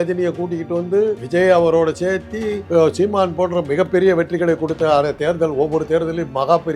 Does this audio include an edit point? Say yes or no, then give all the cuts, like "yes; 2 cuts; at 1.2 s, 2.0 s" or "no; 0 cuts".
yes; 2 cuts; at 1.2 s, 2.6 s